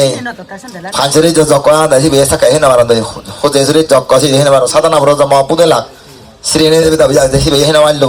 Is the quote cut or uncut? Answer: uncut